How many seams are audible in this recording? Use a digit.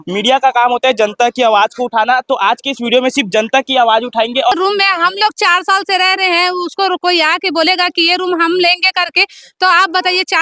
1